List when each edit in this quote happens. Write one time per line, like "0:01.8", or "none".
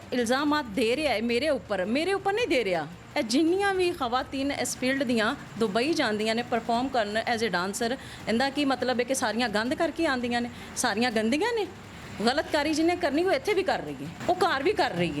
0:11.9
0:14.1